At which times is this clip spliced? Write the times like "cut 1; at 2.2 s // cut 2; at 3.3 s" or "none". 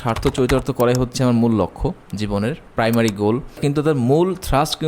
cut 1; at 2.2 s // cut 2; at 3.6 s